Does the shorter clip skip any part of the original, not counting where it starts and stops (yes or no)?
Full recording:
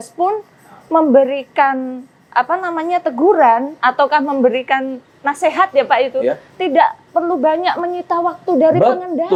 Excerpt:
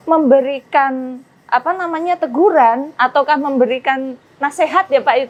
no